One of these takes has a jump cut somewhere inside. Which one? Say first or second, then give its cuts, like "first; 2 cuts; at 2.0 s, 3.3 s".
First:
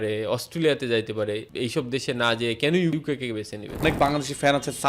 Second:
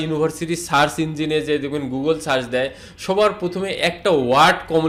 first; 2 cuts; at 1.5 s, 3.8 s